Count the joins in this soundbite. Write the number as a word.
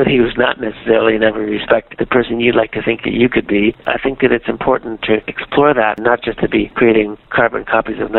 two